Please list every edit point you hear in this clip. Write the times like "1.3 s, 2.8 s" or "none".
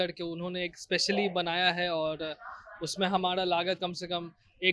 none

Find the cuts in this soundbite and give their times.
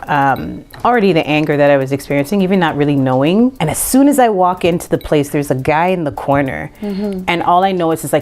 3.6 s

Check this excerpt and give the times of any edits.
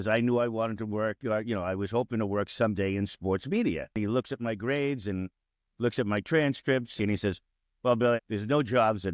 4.0 s, 6.9 s, 8.2 s

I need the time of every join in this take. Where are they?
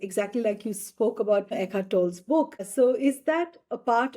1.6 s, 2.7 s

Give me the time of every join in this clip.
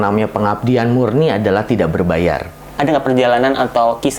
2.7 s

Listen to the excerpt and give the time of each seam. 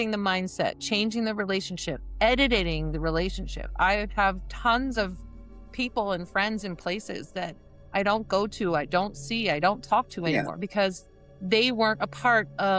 none

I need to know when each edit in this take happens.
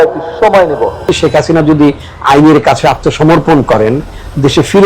1.1 s

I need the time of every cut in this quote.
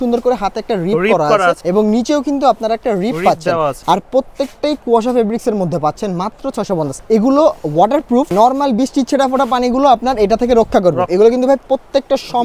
1.6 s, 3.8 s, 7.0 s, 8.3 s, 11.1 s

